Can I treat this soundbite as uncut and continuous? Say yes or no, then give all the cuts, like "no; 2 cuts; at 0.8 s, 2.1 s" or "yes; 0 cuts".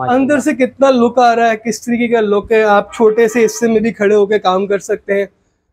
yes; 0 cuts